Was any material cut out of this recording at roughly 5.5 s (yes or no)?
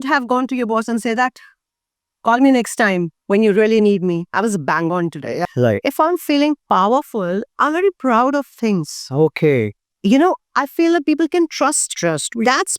yes